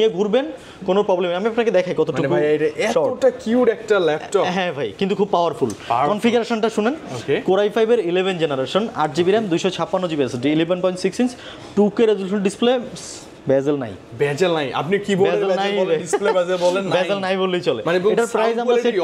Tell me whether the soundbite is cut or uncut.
uncut